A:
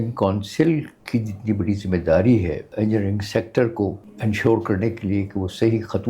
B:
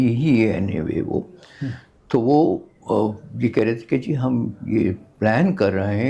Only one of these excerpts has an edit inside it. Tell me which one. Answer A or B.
A